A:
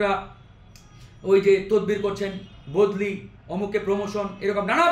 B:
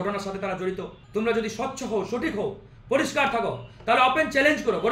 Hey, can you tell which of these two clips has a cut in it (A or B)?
B